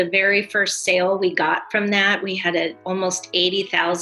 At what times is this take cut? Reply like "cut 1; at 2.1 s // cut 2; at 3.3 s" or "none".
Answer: cut 1; at 2.8 s